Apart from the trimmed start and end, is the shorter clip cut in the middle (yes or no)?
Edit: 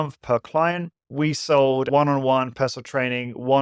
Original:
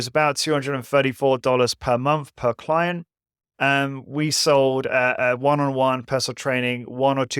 yes